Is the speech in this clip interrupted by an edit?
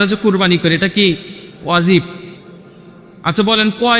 no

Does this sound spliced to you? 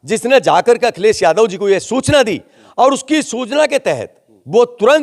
no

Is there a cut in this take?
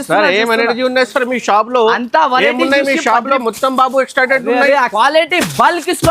yes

